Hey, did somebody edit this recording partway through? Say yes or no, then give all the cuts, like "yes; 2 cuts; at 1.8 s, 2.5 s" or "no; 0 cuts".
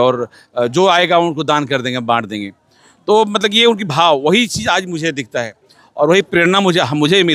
no; 0 cuts